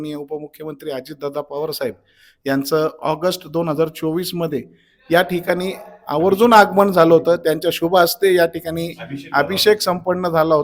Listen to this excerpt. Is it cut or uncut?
uncut